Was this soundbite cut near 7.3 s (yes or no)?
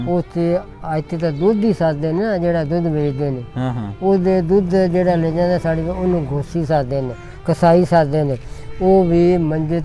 no